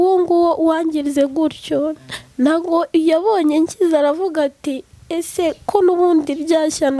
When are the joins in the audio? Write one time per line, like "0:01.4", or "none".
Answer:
none